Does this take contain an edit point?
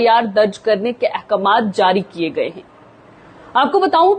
no; 0 cuts

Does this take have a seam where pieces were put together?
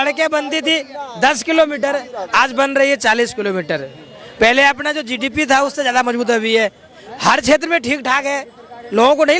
no; 0 cuts

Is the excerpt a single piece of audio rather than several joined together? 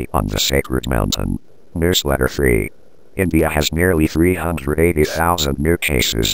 no; 1 cut; at 1.7 s

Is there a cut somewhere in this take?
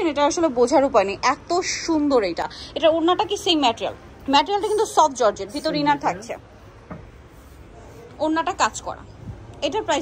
no; 0 cuts

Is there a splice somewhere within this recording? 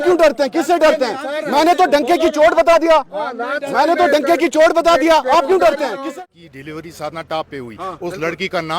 yes; 1 cut; at 6.0 s

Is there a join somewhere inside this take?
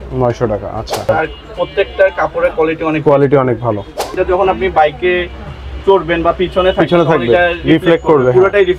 yes; 2 cuts; at 1.1 s, 4.2 s

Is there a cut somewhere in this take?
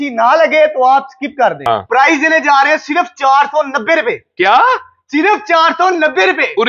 yes; 1 cut; at 1.6 s

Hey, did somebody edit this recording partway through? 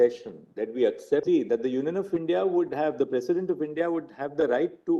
yes; 1 cut; at 1.2 s

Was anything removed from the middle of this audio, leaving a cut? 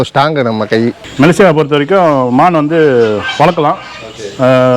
yes; 1 cut; at 1.0 s

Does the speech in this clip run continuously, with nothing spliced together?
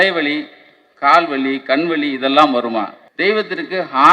no; 1 cut; at 3.0 s

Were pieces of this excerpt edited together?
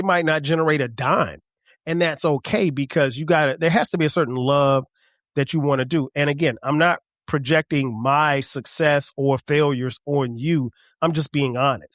no; 0 cuts

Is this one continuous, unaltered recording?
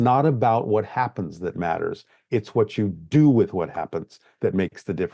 yes; 0 cuts

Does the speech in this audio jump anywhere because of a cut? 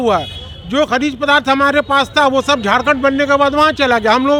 no; 0 cuts

